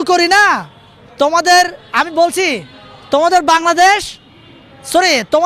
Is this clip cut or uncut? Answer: uncut